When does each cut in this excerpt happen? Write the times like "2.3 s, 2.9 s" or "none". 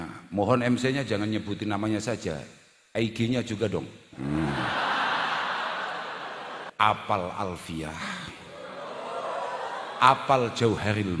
6.7 s